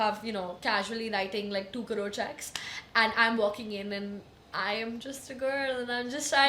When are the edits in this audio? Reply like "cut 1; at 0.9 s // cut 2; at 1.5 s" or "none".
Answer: none